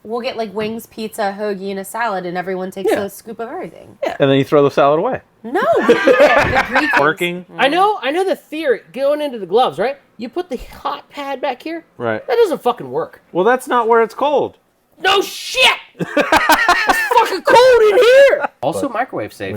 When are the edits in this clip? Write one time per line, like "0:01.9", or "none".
0:07.0
0:18.6